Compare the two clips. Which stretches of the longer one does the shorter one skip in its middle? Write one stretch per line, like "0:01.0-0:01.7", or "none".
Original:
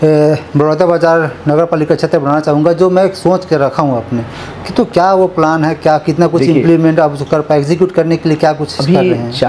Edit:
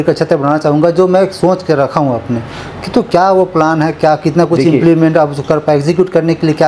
none